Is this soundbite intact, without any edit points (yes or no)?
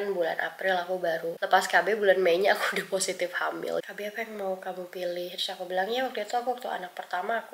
no